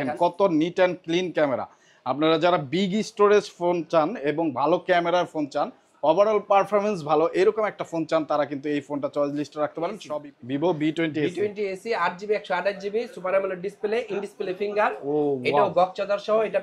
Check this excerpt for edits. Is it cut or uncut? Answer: cut